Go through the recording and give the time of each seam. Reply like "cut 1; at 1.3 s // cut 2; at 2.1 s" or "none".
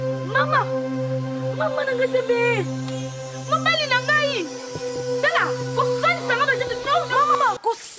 none